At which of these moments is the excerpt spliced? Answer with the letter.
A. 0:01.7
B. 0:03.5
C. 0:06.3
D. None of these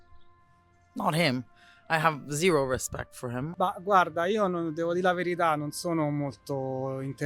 B